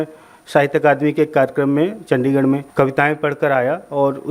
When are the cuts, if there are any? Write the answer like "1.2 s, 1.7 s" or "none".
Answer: 2.7 s